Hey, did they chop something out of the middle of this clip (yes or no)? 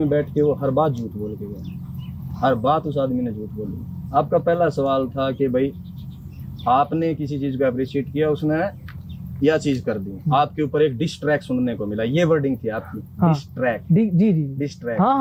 no